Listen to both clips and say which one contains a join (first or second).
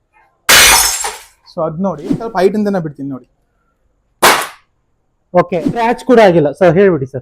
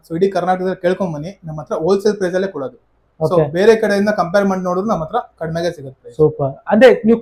first